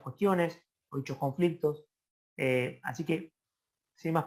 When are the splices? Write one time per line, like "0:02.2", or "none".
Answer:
none